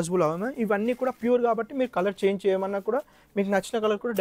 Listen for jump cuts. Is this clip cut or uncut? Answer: uncut